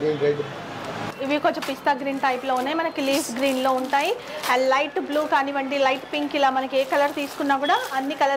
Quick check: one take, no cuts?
no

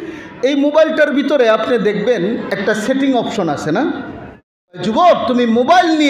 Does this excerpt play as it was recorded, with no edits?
no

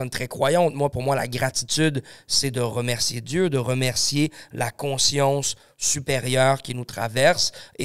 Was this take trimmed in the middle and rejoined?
no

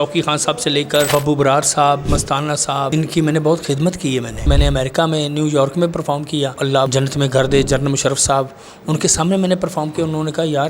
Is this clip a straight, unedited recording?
no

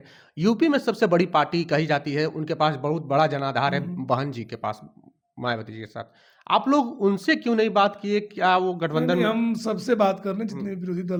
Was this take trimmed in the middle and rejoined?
no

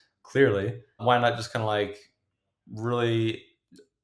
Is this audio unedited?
no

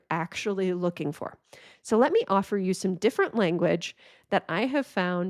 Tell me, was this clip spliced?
no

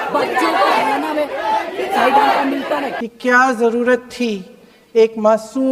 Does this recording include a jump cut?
yes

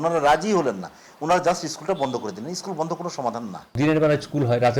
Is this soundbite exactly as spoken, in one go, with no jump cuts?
no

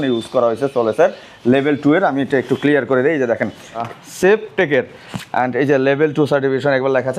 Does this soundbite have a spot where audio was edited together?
yes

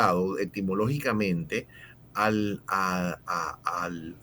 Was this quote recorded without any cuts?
yes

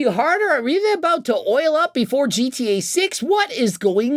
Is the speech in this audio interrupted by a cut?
no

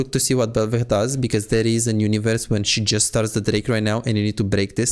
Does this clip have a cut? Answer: no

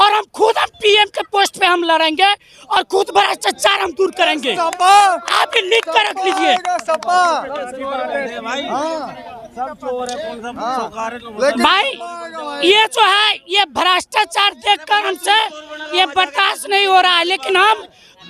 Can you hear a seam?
no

